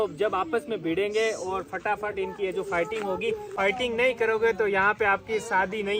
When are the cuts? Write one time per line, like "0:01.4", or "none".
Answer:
0:03.5

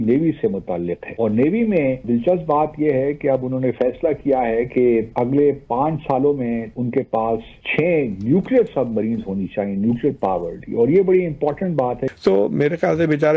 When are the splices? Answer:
0:01.0
0:06.7
0:07.6
0:12.1

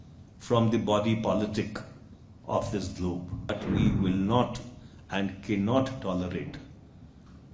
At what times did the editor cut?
0:03.5

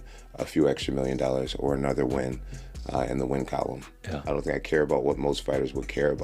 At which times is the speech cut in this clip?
0:04.2

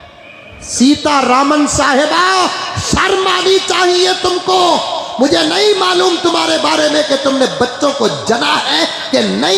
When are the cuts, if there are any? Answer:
none

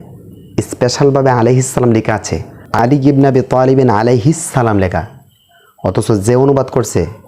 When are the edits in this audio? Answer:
0:02.8

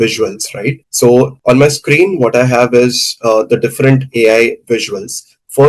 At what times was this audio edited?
none

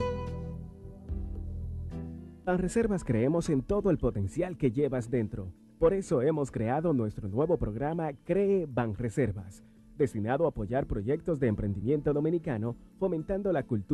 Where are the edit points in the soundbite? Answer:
0:02.4

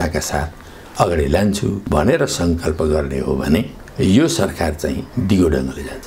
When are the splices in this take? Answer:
0:01.8
0:05.1

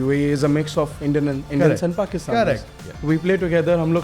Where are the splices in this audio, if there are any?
none

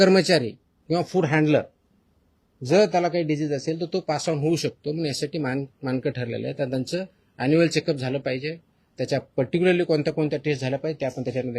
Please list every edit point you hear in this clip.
none

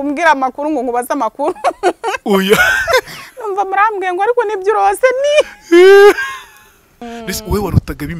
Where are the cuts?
0:07.0

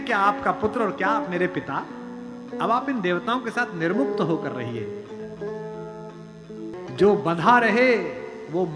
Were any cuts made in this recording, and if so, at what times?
none

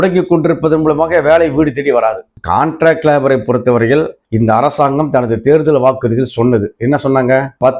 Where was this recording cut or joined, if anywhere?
0:02.3

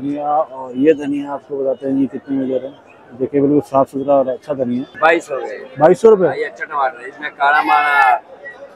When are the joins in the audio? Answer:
0:05.0

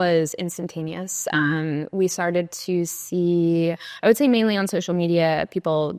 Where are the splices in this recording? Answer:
none

